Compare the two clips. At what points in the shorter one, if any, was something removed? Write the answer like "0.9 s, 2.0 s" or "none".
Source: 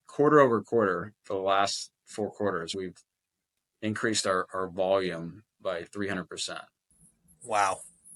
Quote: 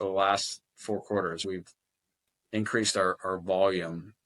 none